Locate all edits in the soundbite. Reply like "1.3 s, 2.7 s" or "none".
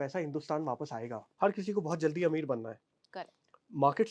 1.2 s

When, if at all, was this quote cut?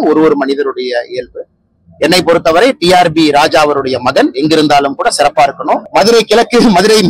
5.8 s

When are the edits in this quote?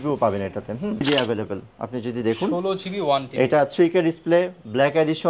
1.0 s

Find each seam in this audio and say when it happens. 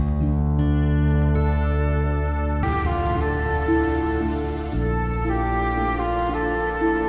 2.6 s

